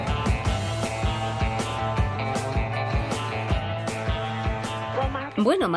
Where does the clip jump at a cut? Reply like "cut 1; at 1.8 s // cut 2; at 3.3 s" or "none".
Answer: none